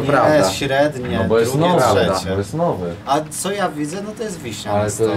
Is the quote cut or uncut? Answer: uncut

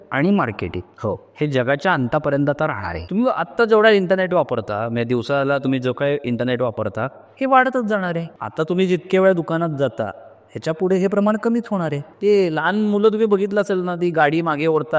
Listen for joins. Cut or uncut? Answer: cut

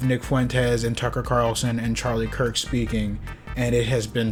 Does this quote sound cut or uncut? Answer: uncut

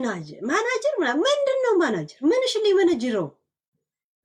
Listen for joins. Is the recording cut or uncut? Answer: uncut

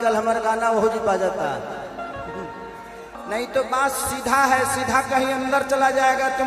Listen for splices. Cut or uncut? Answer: cut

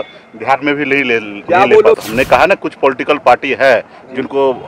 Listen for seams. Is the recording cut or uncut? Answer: cut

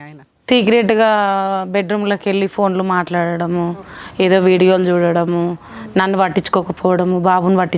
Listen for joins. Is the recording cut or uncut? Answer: uncut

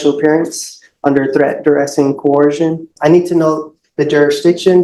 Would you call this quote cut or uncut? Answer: cut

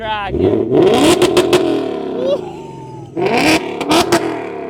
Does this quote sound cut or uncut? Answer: uncut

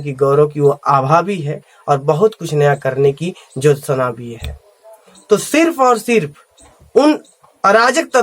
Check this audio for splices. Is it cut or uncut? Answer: uncut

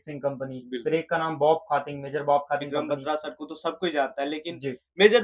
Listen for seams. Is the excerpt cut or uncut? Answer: cut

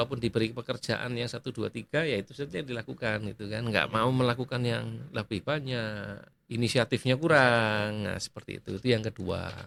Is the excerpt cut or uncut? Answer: uncut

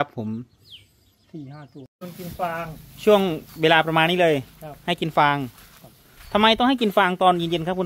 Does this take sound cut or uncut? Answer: cut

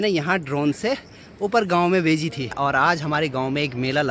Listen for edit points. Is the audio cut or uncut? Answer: cut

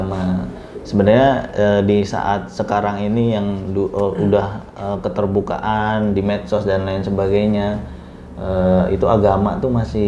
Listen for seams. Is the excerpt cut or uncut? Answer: uncut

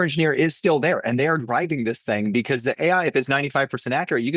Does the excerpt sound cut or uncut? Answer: uncut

